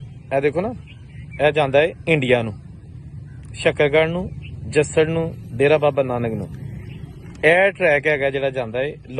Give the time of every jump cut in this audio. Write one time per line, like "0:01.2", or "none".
none